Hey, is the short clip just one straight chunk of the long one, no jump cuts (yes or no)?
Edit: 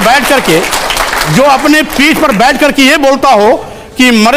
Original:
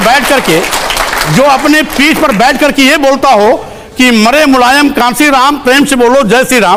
yes